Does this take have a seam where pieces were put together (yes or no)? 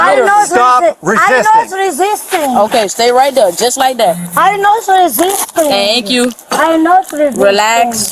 no